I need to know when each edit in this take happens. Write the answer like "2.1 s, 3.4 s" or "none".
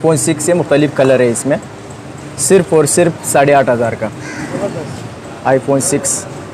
none